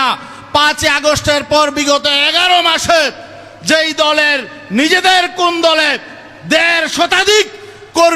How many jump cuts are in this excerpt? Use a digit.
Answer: 0